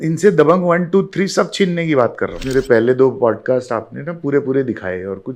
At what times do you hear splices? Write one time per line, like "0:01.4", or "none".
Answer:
0:02.4